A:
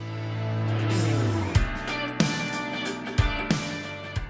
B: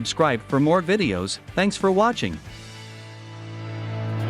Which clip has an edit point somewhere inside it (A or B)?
B